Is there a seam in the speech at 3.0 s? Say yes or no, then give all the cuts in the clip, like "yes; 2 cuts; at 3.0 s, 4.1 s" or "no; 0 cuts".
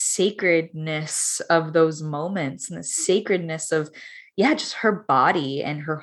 no; 0 cuts